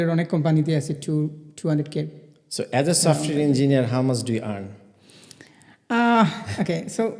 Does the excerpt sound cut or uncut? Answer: uncut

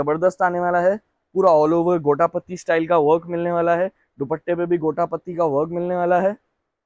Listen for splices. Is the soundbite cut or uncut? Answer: uncut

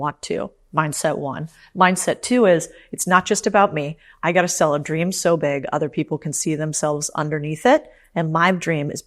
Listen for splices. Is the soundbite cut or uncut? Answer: uncut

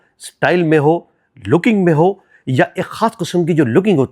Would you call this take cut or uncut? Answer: uncut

